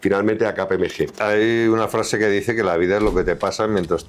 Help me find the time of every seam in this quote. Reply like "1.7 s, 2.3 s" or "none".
1.2 s